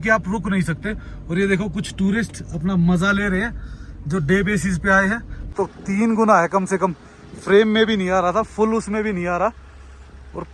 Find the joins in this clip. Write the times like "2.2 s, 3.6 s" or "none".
5.5 s